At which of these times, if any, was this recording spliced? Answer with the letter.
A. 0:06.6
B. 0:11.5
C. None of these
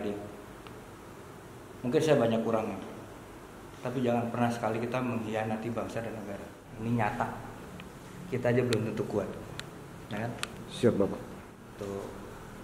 A